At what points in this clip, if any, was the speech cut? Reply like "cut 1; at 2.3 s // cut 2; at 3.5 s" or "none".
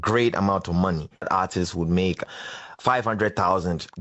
cut 1; at 1.3 s